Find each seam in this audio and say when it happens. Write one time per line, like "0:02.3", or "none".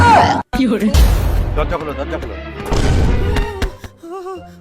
0:01.0